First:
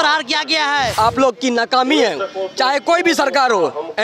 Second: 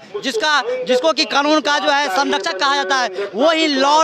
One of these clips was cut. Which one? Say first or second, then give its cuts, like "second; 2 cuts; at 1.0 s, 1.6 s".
first; 1 cut; at 0.9 s